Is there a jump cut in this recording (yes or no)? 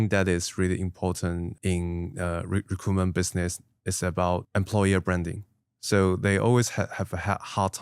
yes